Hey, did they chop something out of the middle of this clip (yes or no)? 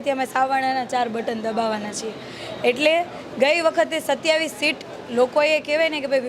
no